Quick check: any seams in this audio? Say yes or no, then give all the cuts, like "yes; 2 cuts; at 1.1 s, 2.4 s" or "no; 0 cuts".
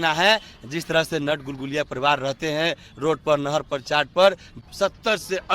yes; 1 cut; at 4.6 s